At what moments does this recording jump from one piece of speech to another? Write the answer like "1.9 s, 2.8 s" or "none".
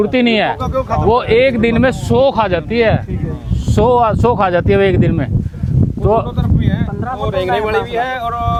none